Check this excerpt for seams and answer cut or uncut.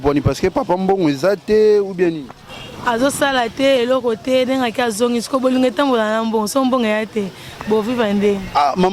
uncut